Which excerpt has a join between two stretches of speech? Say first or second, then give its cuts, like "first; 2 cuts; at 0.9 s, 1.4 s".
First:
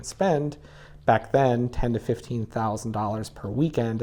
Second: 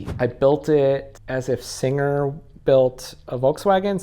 second; 1 cut; at 1.1 s